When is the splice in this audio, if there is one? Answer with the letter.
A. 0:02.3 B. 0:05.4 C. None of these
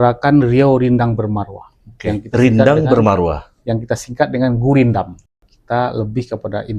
B